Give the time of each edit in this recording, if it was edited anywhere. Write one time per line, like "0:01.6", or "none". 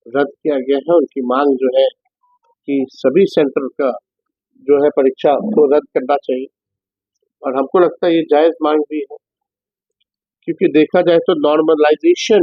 none